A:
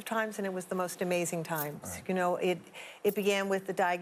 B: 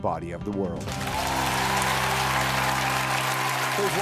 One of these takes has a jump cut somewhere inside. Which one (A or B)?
B